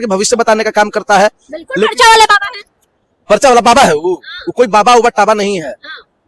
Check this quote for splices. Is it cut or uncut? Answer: uncut